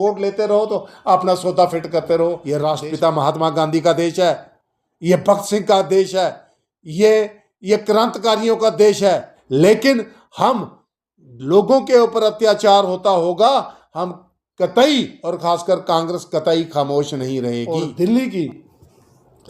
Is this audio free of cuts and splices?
no; 3 cuts; at 2.5 s, 9.3 s, 17.6 s

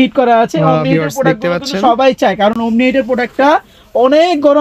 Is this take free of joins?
yes; 0 cuts

